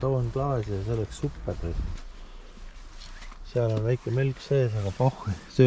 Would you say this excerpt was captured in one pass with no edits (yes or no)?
no